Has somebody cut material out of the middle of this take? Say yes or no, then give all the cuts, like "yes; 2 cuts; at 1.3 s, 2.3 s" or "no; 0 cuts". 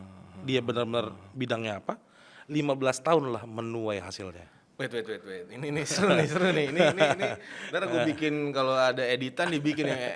no; 0 cuts